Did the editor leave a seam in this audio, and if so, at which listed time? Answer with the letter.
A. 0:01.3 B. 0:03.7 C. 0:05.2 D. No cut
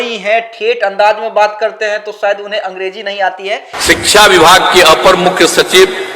B